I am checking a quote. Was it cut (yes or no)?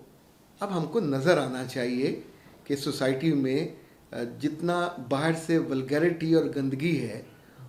no